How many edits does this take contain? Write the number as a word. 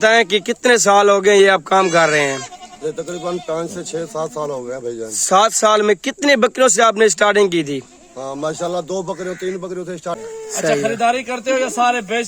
one